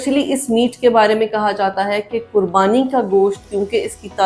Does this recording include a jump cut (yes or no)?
no